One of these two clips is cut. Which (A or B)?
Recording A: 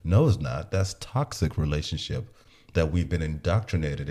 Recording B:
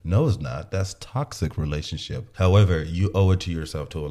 B